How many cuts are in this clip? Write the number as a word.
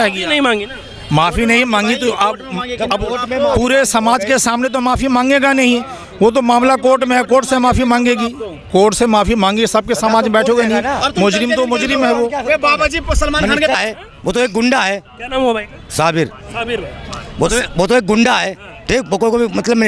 one